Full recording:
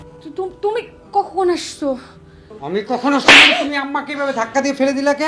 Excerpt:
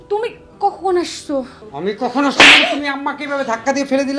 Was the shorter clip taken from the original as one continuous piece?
no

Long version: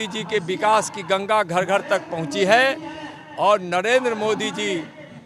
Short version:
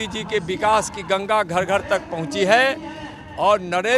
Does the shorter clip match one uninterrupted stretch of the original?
yes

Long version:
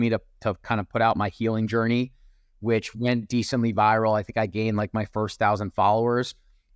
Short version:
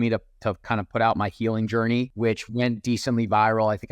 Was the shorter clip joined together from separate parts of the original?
yes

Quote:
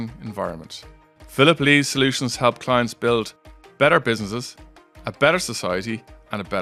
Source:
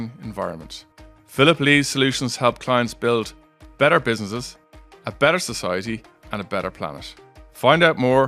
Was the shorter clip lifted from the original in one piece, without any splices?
yes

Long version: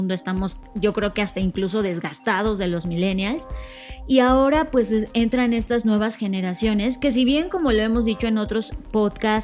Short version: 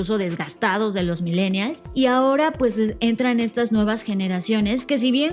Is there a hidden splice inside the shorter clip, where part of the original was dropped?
yes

